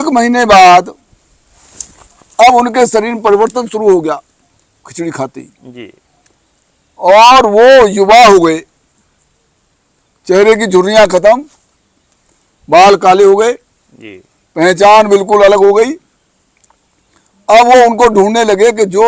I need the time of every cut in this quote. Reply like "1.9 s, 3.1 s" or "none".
none